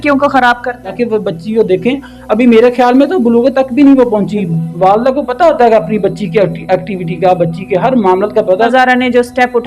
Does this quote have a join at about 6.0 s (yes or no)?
no